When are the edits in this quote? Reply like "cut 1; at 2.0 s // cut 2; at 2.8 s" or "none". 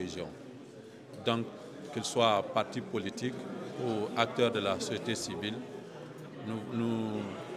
none